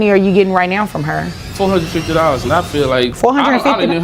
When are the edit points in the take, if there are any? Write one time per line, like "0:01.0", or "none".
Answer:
0:01.4
0:03.1